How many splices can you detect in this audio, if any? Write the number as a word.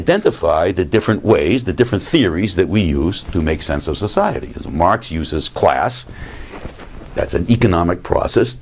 one